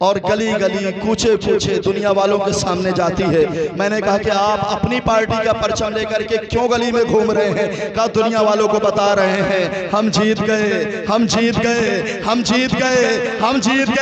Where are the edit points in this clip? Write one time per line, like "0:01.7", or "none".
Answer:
none